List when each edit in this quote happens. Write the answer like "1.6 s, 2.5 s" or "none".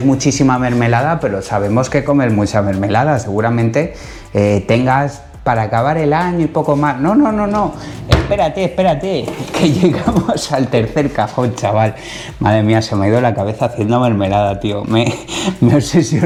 none